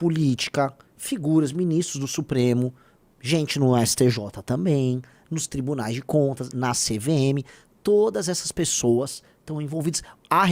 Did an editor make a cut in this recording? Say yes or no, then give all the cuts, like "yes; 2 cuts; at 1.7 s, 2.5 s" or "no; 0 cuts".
no; 0 cuts